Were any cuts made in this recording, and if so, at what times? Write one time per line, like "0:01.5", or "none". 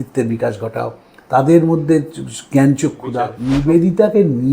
0:03.3